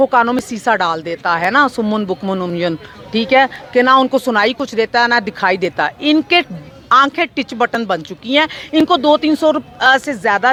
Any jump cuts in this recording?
no; 0 cuts

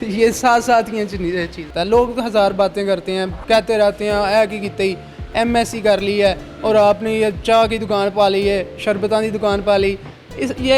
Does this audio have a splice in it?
yes; 1 cut; at 1.7 s

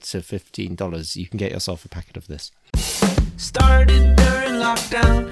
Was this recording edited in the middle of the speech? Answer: yes; 1 cut; at 2.5 s

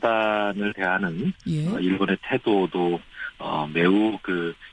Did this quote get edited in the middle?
no; 0 cuts

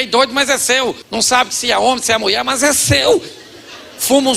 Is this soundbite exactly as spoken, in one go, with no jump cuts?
no; 1 cut; at 1.0 s

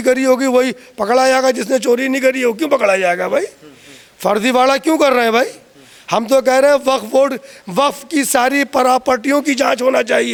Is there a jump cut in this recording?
no; 0 cuts

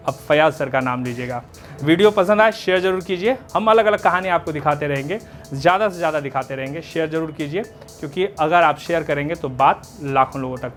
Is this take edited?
no; 0 cuts

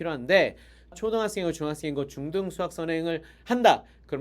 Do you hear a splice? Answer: yes; 1 cut; at 0.9 s

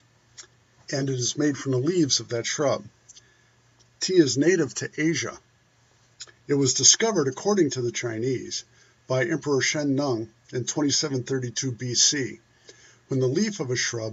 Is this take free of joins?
no; 1 cut; at 5.2 s

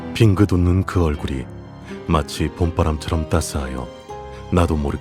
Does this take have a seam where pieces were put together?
no; 0 cuts

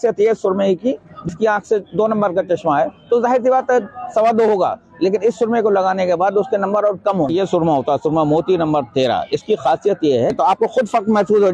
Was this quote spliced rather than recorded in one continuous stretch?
yes; 3 cuts; at 1.3 s, 7.3 s, 10.3 s

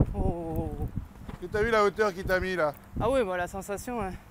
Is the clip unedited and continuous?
yes; 0 cuts

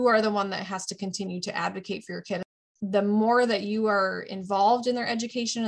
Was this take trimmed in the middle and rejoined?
yes; 1 cut; at 2.6 s

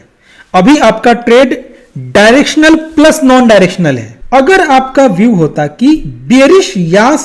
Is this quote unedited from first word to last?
yes; 0 cuts

